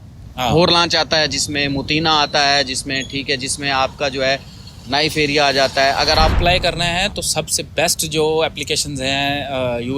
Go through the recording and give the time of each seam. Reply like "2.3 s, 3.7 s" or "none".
6.4 s

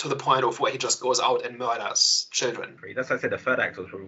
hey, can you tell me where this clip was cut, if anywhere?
none

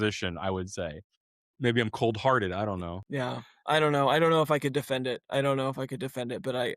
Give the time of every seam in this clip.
1.4 s, 2.8 s

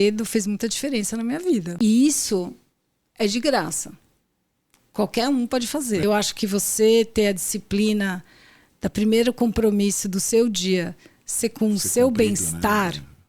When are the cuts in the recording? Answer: 1.7 s, 6.0 s

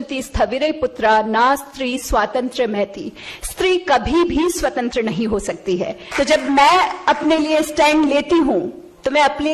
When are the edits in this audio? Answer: 6.0 s

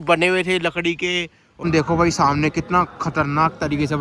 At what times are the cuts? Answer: 1.5 s

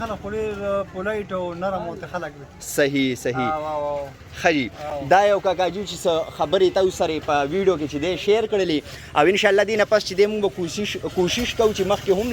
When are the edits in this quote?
none

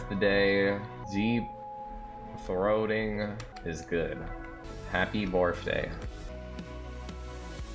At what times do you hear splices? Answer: 1.0 s, 3.5 s, 4.6 s, 6.3 s

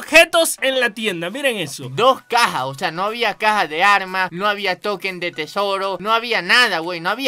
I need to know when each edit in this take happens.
none

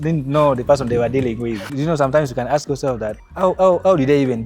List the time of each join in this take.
1.7 s, 3.2 s

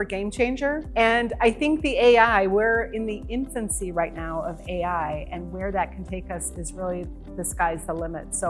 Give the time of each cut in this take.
none

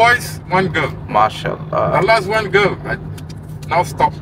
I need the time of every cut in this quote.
none

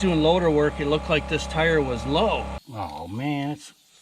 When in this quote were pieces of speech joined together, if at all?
2.6 s

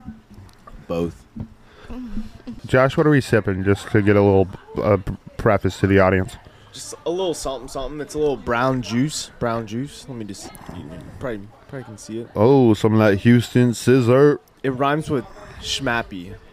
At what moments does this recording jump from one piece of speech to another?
2.6 s

